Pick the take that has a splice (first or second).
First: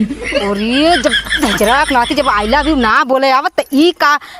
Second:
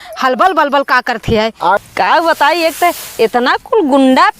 second